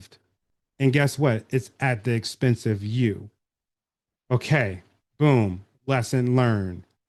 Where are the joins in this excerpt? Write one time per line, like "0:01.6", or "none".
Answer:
none